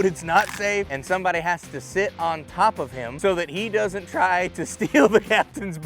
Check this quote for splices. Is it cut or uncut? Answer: cut